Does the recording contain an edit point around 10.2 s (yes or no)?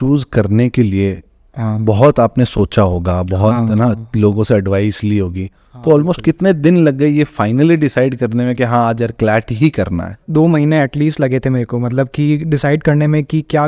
yes